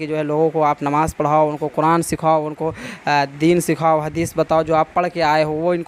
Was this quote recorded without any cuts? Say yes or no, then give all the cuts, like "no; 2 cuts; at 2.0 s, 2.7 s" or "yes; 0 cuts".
yes; 0 cuts